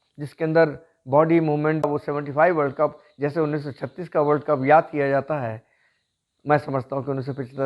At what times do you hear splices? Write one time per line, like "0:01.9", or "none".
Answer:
0:01.9